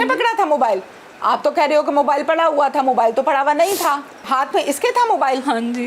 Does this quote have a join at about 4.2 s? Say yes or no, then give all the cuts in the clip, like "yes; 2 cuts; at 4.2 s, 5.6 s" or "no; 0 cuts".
yes; 1 cut; at 4.2 s